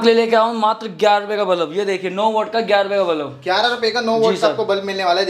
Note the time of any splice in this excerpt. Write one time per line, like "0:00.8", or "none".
none